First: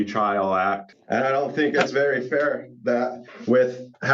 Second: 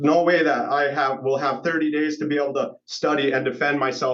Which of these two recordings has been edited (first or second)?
first